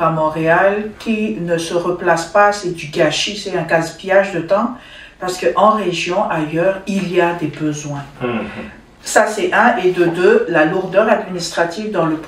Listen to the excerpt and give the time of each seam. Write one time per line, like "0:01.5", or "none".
none